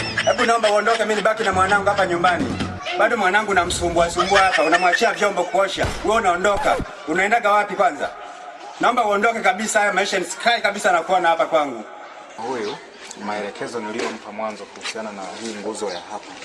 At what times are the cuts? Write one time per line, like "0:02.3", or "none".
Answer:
0:12.4